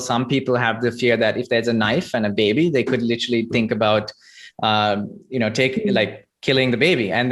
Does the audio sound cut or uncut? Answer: uncut